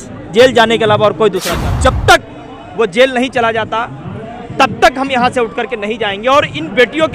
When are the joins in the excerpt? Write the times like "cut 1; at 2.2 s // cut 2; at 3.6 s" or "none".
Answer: cut 1; at 1.5 s